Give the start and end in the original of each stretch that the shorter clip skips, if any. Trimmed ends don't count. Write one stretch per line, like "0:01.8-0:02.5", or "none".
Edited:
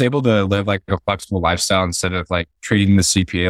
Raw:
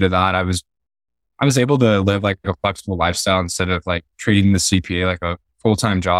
none